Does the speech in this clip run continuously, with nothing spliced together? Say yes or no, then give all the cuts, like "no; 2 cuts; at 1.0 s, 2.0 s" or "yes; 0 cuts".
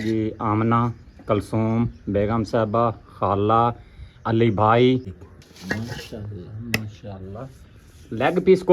no; 1 cut; at 5.1 s